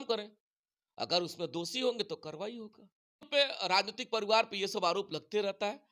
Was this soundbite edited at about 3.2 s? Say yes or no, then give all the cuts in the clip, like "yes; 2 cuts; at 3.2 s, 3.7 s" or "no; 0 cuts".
yes; 1 cut; at 3.2 s